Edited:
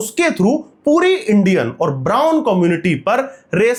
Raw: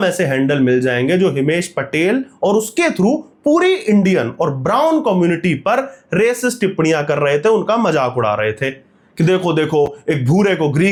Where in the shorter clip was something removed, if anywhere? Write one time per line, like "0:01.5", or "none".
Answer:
none